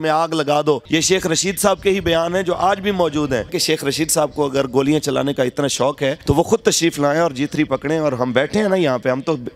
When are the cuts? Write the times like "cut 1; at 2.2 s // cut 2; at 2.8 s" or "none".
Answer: cut 1; at 0.8 s // cut 2; at 3.6 s // cut 3; at 6.2 s